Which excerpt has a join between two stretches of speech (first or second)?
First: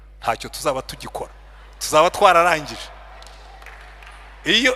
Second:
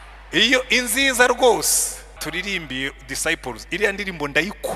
second